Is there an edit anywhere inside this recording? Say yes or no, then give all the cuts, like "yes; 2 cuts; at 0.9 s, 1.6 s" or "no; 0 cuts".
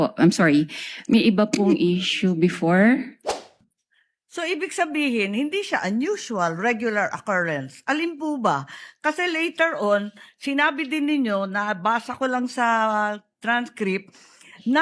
yes; 1 cut; at 3.6 s